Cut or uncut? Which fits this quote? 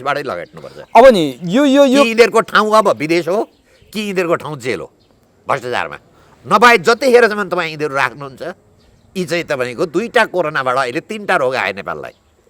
uncut